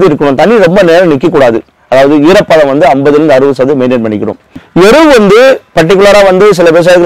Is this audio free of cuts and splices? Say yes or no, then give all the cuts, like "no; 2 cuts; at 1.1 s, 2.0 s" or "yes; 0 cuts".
no; 2 cuts; at 1.7 s, 4.5 s